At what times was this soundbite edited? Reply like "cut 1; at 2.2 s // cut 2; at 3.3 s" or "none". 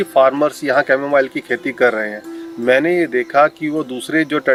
none